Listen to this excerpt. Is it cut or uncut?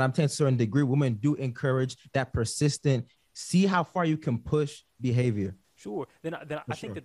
cut